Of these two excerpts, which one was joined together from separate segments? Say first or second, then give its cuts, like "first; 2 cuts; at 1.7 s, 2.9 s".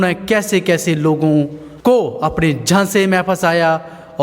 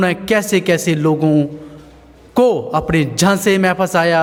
first; 1 cut; at 1.6 s